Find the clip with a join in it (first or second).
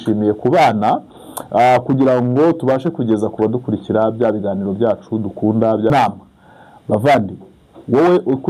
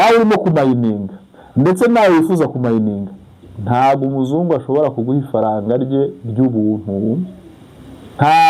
first